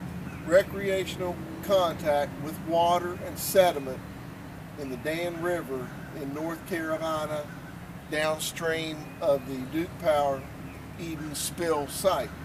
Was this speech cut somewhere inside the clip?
yes; 1 cut; at 11.5 s

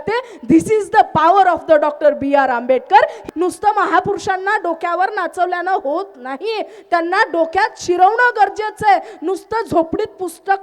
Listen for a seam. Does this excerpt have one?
yes; 1 cut; at 3.2 s

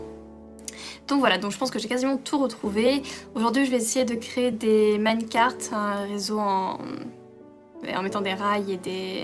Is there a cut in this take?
no; 0 cuts

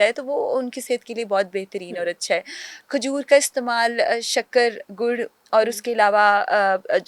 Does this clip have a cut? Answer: no; 0 cuts

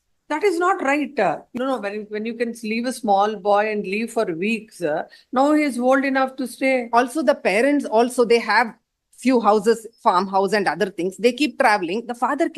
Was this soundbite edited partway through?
yes; 1 cut; at 1.5 s

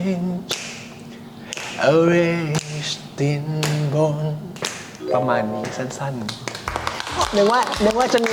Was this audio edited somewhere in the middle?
no; 0 cuts

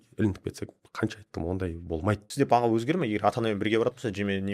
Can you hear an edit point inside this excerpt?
yes; 1 cut; at 2.3 s

